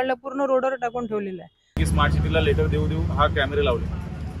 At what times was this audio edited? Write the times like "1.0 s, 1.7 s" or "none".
1.8 s